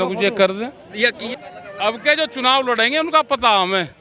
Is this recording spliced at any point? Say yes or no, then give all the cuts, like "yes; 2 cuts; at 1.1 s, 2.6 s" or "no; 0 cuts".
yes; 1 cut; at 1.3 s